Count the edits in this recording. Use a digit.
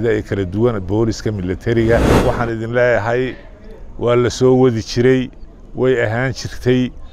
1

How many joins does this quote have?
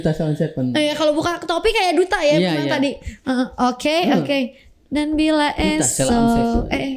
0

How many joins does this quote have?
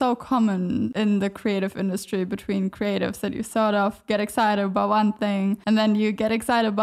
2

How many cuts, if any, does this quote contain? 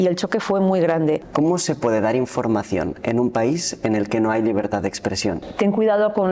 2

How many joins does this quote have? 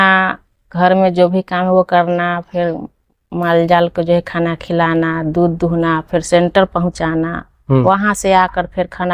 0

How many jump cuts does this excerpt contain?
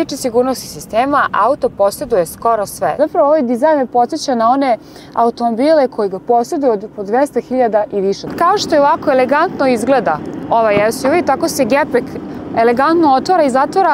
2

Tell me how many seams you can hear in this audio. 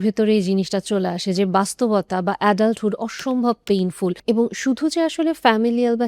1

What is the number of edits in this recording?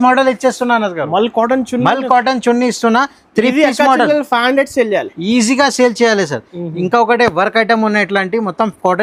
0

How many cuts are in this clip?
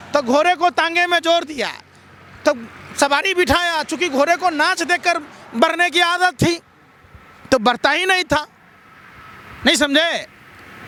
0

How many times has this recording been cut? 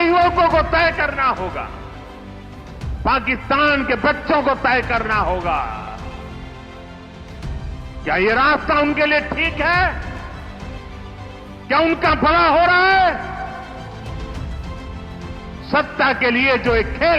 6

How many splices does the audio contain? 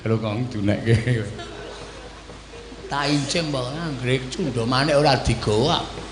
0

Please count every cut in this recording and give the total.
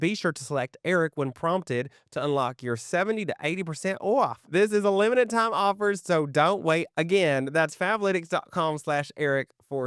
0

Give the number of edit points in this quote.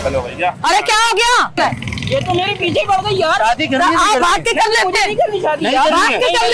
1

